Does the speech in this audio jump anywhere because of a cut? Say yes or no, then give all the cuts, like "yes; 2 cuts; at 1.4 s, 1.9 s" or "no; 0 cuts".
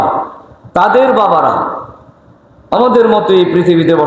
no; 0 cuts